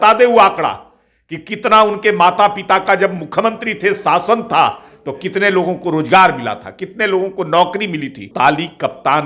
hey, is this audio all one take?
no; 1 cut; at 8.3 s

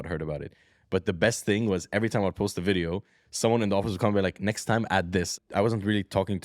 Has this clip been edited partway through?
yes; 1 cut; at 5.3 s

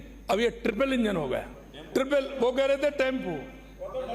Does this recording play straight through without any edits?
no; 1 cut; at 2.0 s

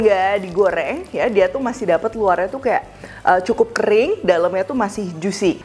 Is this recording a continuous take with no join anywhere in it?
yes; 0 cuts

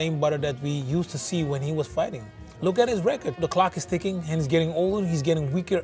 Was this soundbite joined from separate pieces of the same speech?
yes; 1 cut; at 3.4 s

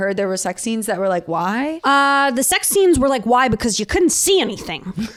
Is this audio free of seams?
yes; 0 cuts

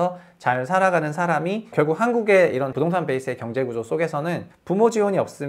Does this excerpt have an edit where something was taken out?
yes; 3 cuts; at 1.7 s, 2.7 s, 4.5 s

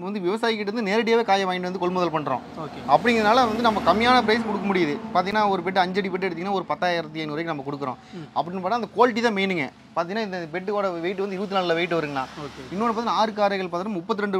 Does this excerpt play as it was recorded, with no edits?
yes; 0 cuts

